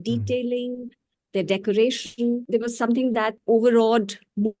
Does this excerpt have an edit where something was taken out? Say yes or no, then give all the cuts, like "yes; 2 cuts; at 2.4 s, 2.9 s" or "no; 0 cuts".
yes; 2 cuts; at 2.4 s, 3.4 s